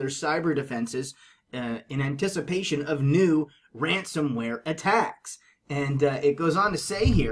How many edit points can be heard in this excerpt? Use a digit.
1